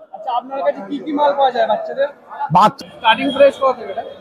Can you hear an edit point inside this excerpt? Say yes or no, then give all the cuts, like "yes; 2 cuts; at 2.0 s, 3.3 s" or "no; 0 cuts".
yes; 1 cut; at 2.7 s